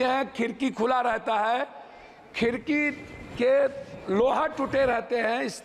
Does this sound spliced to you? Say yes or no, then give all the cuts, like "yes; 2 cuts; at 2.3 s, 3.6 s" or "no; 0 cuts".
no; 0 cuts